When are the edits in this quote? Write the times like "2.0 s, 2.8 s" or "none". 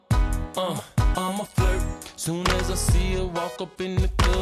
1.1 s